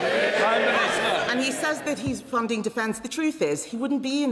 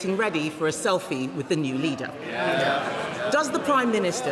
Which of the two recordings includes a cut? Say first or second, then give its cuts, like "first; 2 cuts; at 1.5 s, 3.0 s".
first; 1 cut; at 1.3 s